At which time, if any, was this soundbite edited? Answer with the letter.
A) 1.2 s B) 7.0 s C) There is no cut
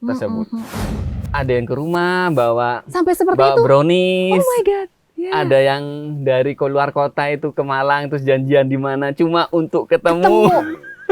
A